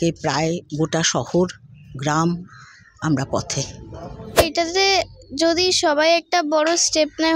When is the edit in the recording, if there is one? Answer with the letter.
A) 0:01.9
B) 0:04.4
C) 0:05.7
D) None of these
B